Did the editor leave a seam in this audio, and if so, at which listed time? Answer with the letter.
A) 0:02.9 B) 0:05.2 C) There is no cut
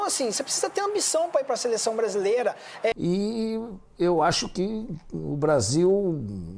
A